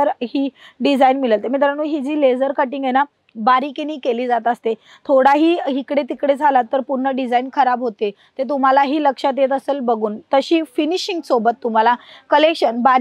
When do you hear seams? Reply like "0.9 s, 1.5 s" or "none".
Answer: none